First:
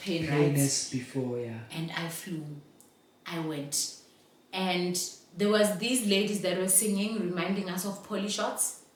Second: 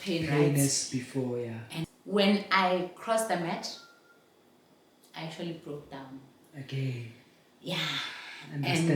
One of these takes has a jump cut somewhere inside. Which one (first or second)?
second